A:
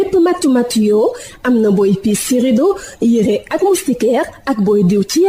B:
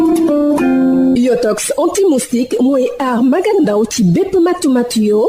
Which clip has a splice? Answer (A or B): B